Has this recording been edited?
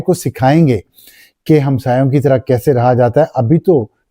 no; 0 cuts

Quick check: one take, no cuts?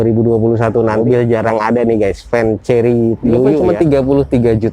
no; 2 cuts; at 1.0 s, 3.6 s

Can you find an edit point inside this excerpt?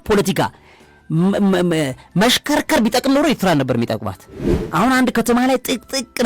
yes; 1 cut; at 4.6 s

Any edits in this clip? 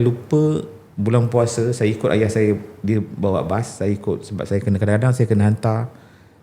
no; 0 cuts

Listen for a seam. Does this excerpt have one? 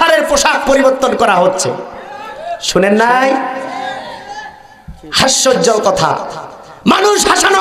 no; 0 cuts

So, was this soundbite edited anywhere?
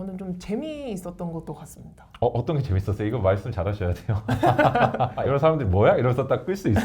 yes; 1 cut; at 5.2 s

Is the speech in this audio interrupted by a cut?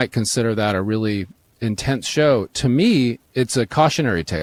no; 0 cuts

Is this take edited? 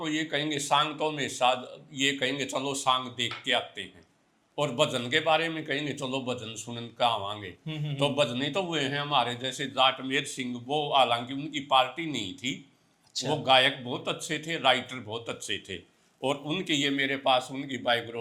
no; 0 cuts

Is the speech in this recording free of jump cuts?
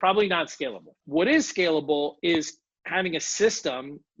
yes; 0 cuts

